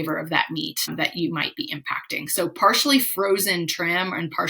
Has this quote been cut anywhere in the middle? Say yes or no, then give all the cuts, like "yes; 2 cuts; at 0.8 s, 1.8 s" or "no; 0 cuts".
yes; 1 cut; at 0.9 s